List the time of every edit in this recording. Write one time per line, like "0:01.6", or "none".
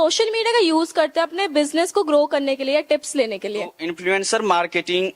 0:03.8